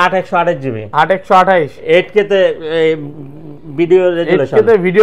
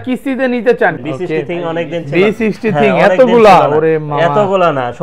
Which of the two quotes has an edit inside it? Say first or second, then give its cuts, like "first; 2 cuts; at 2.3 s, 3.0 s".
second; 1 cut; at 1.0 s